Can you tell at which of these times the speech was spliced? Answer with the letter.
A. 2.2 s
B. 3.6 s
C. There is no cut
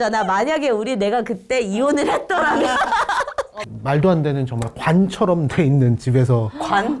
B